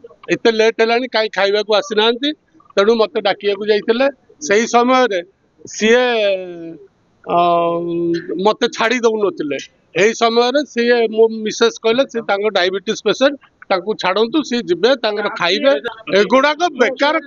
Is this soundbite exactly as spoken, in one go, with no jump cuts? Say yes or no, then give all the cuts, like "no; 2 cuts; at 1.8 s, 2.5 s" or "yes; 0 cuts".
no; 1 cut; at 15.9 s